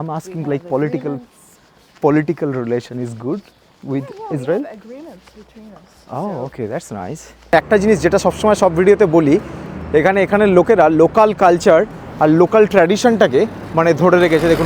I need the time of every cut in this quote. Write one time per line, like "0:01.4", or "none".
0:07.5